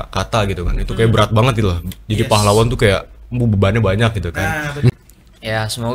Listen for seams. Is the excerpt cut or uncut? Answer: cut